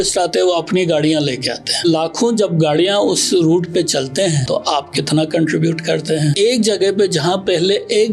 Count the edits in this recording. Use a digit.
3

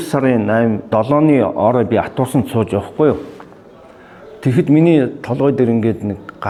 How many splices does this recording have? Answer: 0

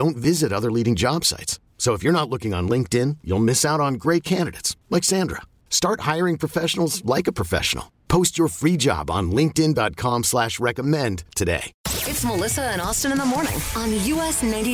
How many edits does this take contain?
1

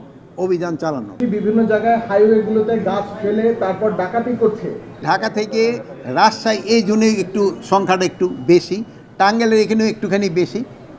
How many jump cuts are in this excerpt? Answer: 2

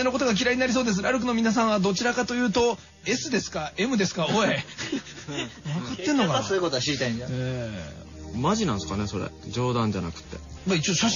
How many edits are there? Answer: 1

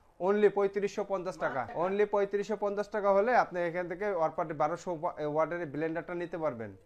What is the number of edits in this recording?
1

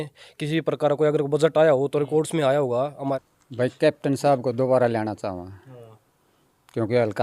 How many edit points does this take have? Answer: 1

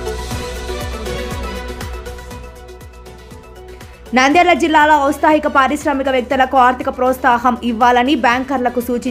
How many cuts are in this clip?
1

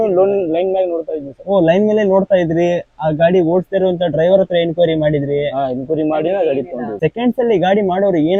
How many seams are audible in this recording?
1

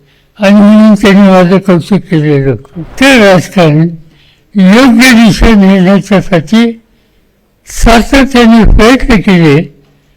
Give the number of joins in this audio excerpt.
1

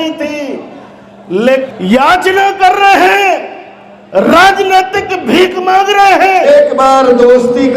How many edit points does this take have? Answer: 2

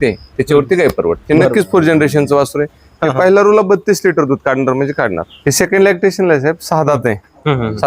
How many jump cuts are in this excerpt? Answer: 2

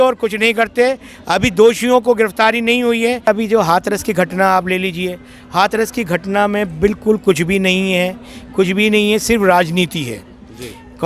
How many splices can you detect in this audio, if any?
1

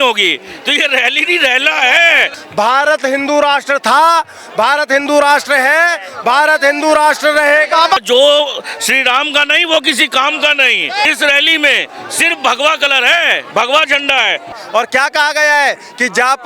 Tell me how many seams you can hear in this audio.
4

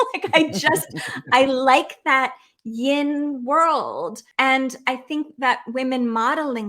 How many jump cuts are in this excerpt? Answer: 1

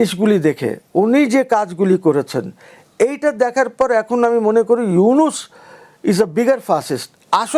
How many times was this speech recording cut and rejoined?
0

